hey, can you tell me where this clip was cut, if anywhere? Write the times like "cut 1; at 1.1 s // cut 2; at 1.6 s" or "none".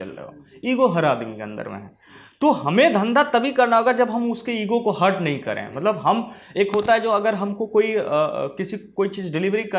none